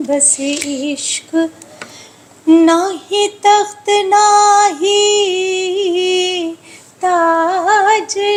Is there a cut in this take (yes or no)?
no